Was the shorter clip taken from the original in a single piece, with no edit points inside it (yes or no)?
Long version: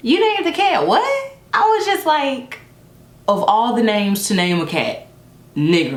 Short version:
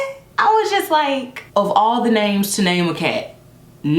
no